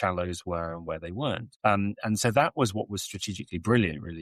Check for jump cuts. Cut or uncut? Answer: cut